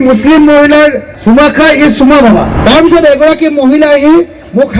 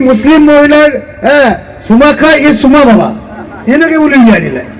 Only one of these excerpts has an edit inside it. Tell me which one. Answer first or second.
first